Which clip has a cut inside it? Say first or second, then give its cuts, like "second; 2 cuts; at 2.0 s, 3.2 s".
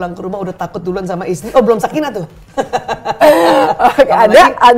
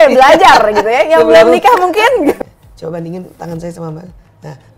second; 1 cut; at 2.4 s